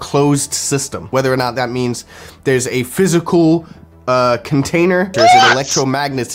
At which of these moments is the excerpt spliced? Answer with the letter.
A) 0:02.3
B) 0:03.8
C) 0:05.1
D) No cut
C